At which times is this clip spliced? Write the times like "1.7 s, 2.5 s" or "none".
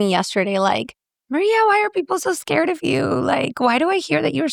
none